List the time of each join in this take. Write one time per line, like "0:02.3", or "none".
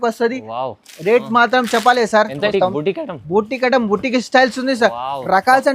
0:02.5

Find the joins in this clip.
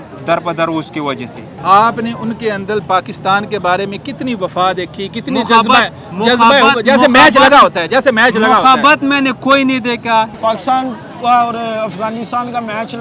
0:01.5
0:10.3

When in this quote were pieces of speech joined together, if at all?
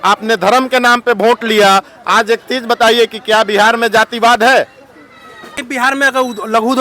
0:05.7

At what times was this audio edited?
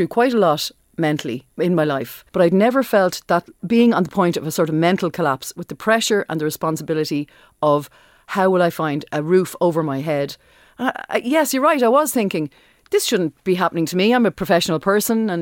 0:01.4
0:02.2
0:03.5
0:09.0

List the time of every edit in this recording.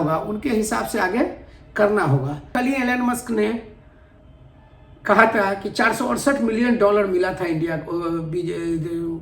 0:02.5

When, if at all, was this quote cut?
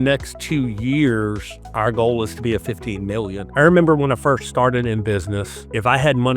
0:03.4

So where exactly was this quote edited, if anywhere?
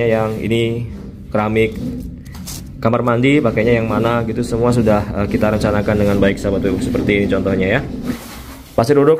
0:08.2

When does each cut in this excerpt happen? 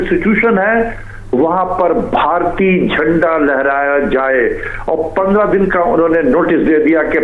none

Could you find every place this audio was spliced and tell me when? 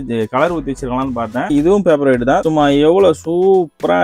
0:01.5
0:02.4

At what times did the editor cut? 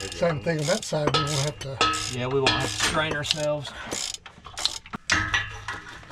0:05.0

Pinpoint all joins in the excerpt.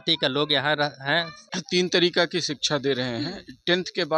0:01.5

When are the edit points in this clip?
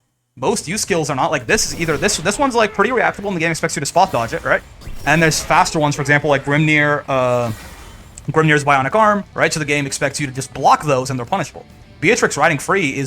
0:09.3

